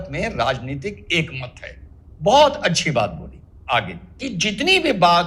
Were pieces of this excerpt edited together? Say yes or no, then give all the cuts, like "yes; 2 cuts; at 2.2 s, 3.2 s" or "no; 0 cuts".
yes; 1 cut; at 4.2 s